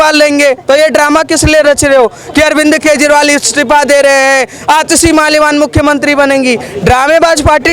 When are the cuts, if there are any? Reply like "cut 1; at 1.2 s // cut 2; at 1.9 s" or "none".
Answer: none

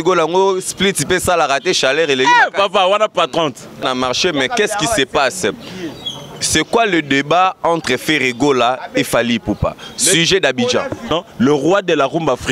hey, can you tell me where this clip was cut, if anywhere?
cut 1; at 3.8 s // cut 2; at 11.1 s

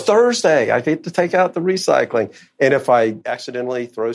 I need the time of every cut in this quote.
cut 1; at 3.3 s

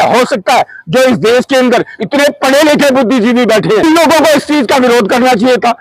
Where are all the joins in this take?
cut 1; at 3.8 s

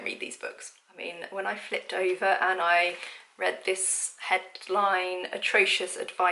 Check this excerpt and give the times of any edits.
cut 1; at 0.9 s

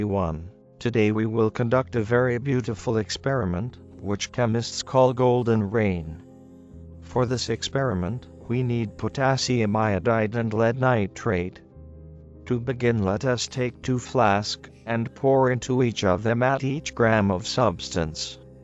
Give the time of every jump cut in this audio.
none

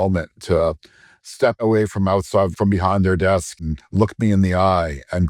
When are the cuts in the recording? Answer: cut 1; at 1.6 s // cut 2; at 2.5 s // cut 3; at 3.7 s

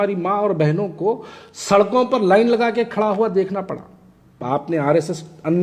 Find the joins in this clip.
cut 1; at 4.4 s

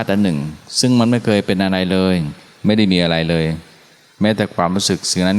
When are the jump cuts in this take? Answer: none

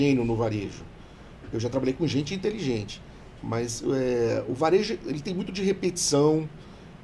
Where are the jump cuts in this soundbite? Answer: none

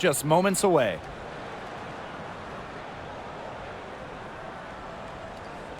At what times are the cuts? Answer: cut 1; at 1.0 s

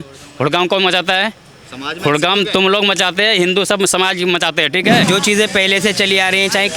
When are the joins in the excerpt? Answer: cut 1; at 5.0 s

